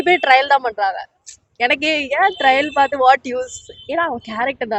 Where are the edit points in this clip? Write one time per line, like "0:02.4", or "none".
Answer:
none